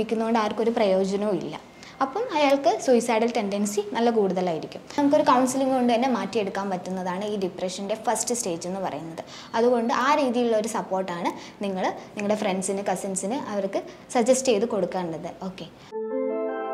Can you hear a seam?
yes; 2 cuts; at 5.0 s, 15.8 s

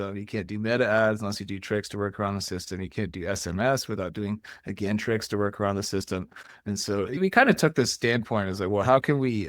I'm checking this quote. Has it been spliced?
yes; 1 cut; at 7.2 s

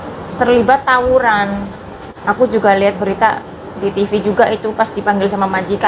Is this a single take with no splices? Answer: no; 1 cut; at 2.1 s

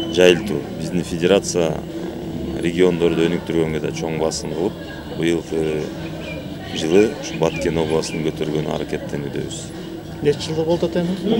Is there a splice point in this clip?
no; 0 cuts

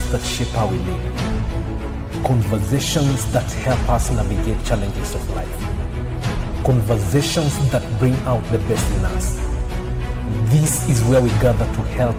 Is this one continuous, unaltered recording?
yes; 0 cuts

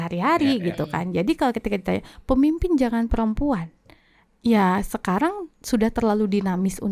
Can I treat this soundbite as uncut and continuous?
yes; 0 cuts

